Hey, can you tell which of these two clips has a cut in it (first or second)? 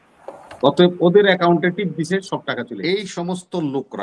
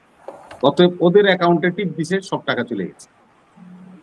first